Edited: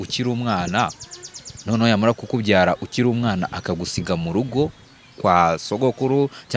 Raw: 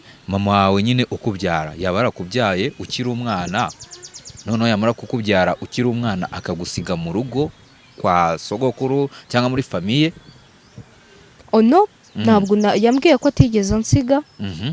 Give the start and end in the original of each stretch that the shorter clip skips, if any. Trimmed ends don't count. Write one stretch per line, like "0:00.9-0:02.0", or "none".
none